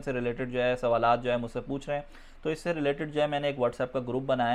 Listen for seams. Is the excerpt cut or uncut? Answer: uncut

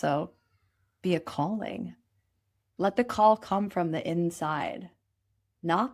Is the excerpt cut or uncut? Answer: uncut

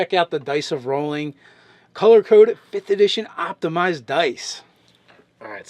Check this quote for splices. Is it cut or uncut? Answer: cut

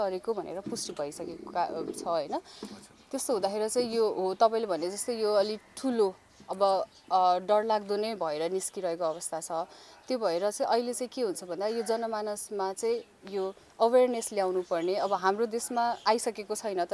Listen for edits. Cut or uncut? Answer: uncut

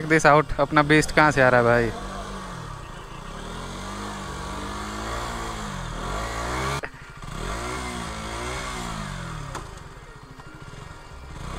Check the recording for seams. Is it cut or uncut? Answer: uncut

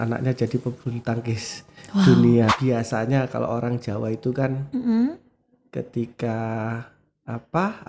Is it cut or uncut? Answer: cut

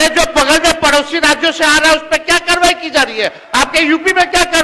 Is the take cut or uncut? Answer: uncut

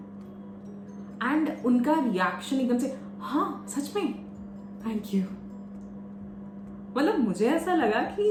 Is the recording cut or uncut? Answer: uncut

